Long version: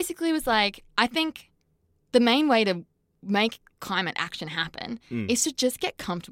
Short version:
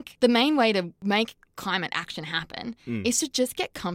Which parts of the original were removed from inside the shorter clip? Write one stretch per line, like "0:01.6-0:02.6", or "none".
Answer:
0:02.9-0:03.2